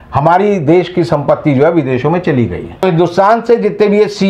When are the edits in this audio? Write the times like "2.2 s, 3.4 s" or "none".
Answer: 2.8 s